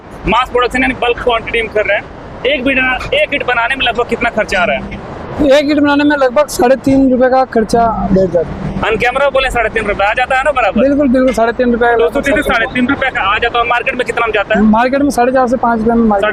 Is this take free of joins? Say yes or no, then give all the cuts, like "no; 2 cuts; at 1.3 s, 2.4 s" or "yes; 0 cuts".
yes; 0 cuts